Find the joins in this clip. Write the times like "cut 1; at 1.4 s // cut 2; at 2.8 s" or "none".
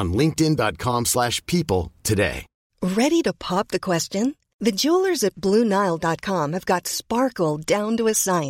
cut 1; at 2.6 s